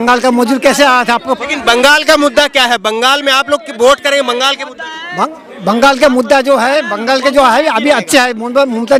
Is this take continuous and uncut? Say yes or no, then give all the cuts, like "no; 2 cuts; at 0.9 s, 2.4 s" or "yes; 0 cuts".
yes; 0 cuts